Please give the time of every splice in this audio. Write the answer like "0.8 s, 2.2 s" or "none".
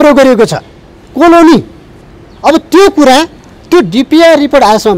none